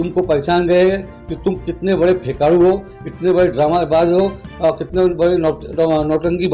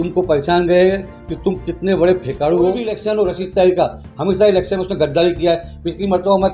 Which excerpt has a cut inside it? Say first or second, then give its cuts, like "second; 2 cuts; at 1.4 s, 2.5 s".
second; 1 cut; at 2.9 s